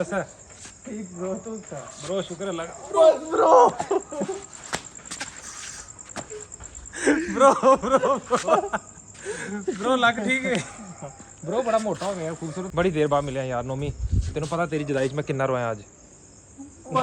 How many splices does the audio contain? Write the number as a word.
one